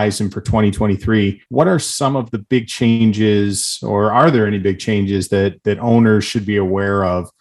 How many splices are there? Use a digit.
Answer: 1